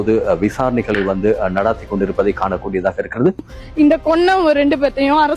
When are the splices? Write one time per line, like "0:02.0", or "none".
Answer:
0:03.5